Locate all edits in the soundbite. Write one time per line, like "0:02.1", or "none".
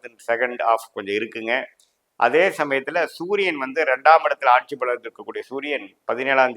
none